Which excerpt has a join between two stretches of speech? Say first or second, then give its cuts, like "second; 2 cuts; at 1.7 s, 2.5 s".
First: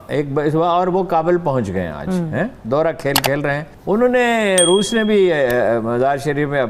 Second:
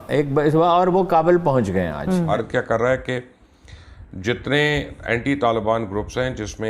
second; 1 cut; at 2.3 s